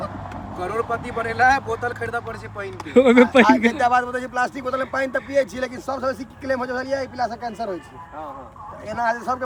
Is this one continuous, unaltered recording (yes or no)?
yes